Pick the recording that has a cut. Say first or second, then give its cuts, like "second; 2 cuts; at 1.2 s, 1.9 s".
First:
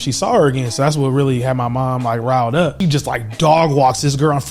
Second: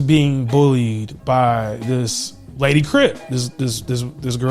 first; 1 cut; at 2.6 s